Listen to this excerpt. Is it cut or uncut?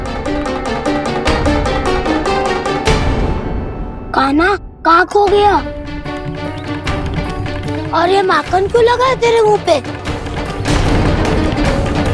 uncut